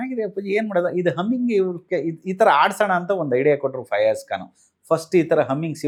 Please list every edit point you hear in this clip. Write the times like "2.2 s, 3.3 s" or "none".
none